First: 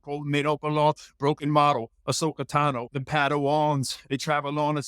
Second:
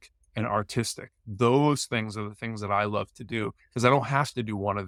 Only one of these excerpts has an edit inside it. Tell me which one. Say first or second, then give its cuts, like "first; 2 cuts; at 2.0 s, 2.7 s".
first; 2 cuts; at 2.9 s, 4.0 s